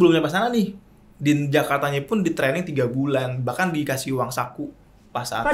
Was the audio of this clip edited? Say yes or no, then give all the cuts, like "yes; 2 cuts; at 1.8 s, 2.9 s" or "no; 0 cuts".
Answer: no; 0 cuts